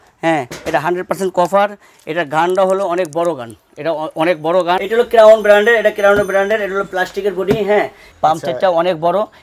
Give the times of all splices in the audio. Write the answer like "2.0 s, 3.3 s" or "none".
4.8 s, 8.0 s